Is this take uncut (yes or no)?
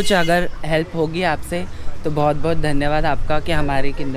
yes